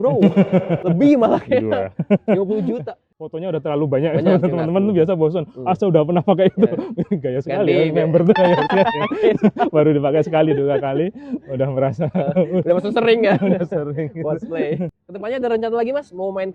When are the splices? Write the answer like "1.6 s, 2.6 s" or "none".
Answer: 3.3 s, 14.9 s